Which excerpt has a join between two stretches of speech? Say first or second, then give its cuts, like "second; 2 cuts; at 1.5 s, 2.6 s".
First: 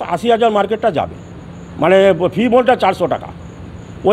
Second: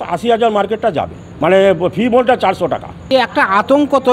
second; 2 cuts; at 1.2 s, 3.1 s